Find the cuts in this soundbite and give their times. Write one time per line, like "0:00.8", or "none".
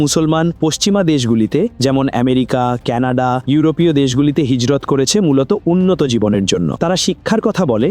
none